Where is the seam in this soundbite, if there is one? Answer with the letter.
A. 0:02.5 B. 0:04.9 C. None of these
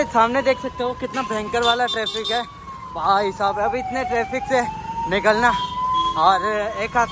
C